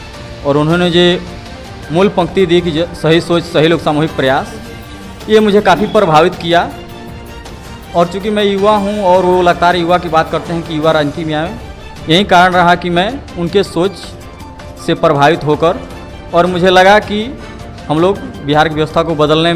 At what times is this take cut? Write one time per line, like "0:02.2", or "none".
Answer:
none

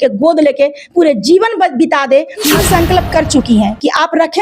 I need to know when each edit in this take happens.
0:02.5

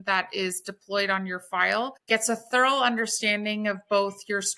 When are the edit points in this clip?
0:02.0

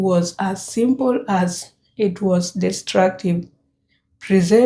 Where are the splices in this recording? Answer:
none

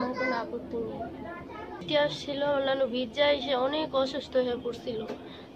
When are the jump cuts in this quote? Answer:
0:01.8

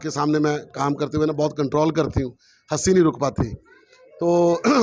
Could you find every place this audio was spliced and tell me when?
none

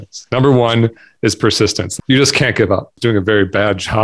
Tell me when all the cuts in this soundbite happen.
0:01.9
0:03.0

